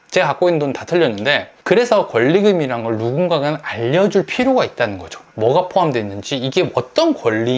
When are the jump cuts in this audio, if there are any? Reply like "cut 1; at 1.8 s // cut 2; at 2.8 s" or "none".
none